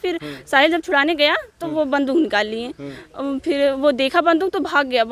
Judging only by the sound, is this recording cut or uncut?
uncut